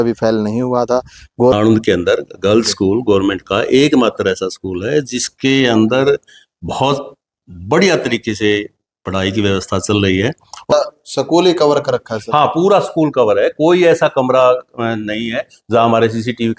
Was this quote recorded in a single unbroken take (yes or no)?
no